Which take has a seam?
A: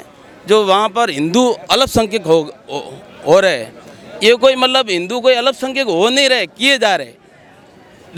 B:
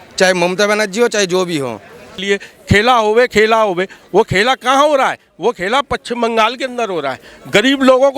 B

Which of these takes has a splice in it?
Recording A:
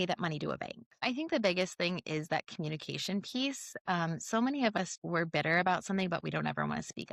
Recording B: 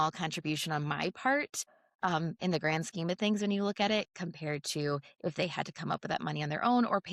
A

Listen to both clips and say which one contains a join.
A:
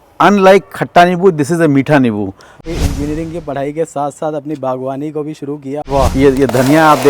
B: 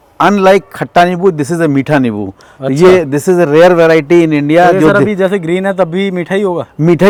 A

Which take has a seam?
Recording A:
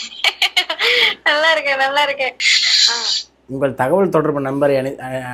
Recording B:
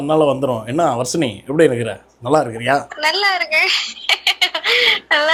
A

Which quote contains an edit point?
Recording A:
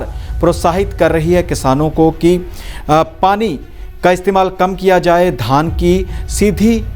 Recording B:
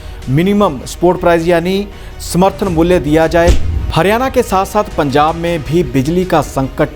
B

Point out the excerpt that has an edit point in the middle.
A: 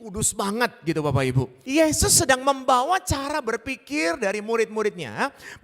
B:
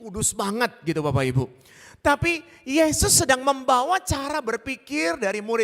A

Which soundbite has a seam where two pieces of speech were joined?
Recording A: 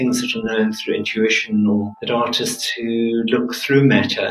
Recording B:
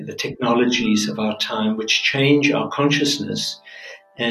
A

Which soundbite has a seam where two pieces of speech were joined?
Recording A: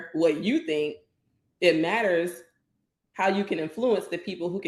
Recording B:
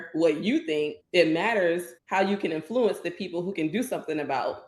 B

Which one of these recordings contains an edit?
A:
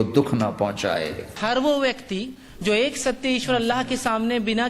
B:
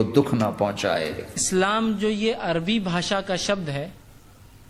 A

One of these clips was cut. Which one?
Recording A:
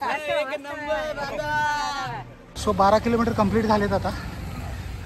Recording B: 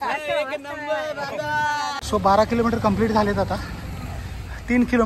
B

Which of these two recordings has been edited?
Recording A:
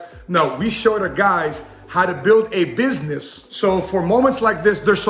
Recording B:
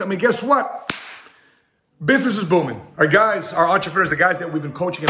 B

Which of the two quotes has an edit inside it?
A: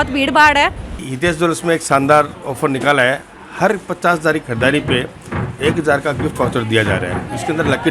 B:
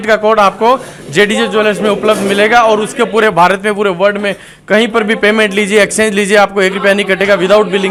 A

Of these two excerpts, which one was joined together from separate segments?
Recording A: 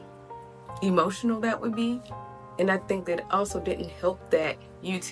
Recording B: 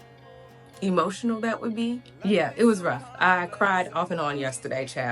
B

